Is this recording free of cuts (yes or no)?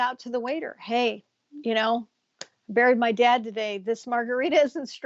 yes